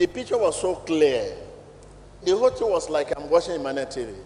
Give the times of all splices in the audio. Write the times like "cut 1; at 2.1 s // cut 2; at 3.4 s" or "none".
cut 1; at 2.1 s